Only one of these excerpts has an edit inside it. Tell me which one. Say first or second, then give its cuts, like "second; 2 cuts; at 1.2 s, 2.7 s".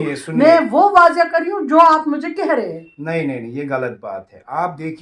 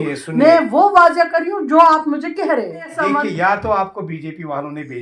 second; 1 cut; at 2.9 s